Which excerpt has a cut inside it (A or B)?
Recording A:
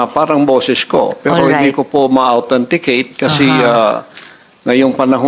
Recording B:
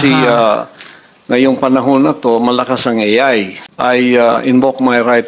B